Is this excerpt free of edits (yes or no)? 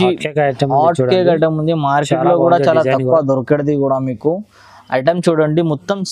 yes